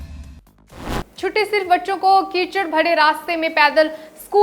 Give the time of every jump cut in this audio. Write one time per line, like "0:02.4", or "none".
0:01.0